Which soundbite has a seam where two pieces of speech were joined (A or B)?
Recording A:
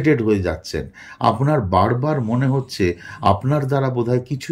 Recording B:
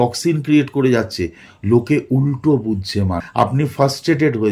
B